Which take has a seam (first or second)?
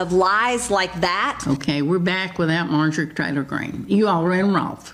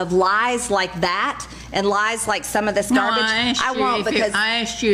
first